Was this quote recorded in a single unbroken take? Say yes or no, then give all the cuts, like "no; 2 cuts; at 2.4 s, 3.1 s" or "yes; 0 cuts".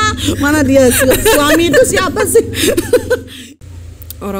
no; 1 cut; at 3.3 s